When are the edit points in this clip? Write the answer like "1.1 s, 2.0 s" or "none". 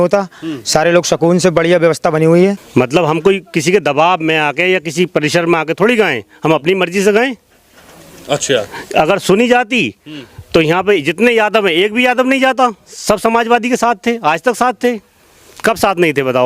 2.6 s